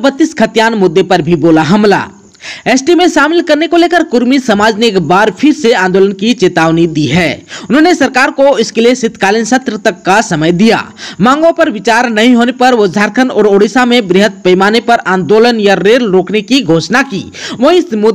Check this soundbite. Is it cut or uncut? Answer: uncut